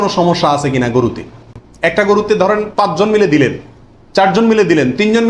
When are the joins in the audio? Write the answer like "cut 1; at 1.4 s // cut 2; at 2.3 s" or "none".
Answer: none

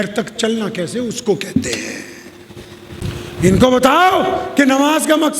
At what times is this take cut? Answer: cut 1; at 3.0 s

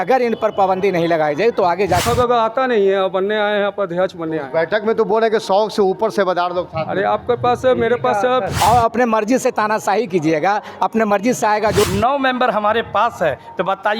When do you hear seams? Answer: cut 1; at 2.0 s // cut 2; at 8.5 s // cut 3; at 11.8 s

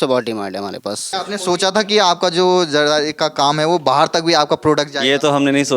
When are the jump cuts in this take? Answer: cut 1; at 1.2 s

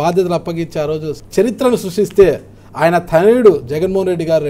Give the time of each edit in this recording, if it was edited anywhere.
cut 1; at 1.2 s

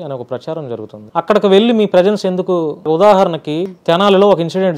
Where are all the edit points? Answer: cut 1; at 1.0 s // cut 2; at 2.8 s // cut 3; at 3.7 s

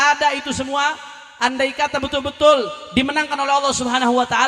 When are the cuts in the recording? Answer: none

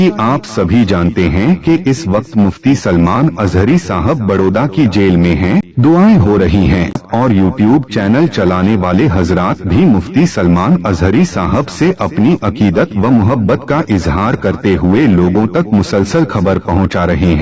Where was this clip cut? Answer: cut 1; at 5.7 s // cut 2; at 7.0 s

